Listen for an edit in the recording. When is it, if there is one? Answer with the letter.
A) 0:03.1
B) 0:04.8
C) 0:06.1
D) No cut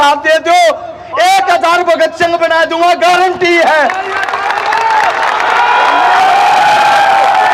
D